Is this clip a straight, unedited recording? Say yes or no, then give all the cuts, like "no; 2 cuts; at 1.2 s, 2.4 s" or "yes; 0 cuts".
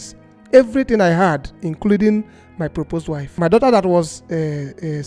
no; 2 cuts; at 1.6 s, 3.2 s